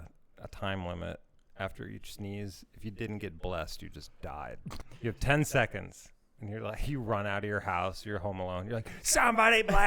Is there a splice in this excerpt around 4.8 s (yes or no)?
yes